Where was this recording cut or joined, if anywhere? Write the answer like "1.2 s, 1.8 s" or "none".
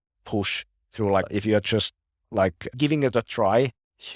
1.3 s, 2.7 s

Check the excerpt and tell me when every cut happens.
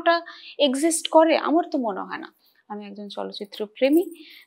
2.3 s

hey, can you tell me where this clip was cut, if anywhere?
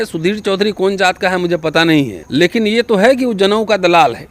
2.2 s

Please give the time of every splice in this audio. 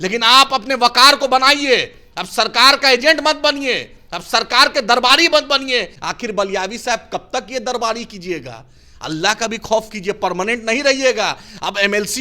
6.0 s

